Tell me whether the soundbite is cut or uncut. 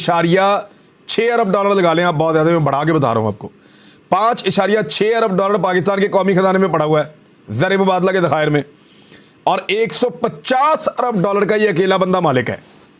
uncut